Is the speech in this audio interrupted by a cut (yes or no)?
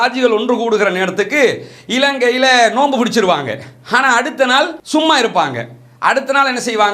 no